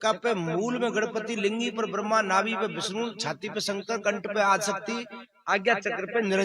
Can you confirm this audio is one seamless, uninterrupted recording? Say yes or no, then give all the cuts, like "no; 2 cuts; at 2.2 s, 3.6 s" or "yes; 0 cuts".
yes; 0 cuts